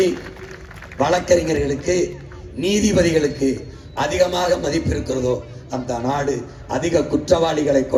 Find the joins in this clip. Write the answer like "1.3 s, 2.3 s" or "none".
none